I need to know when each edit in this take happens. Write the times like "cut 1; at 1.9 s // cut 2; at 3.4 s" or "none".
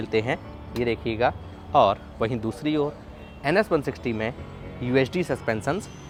none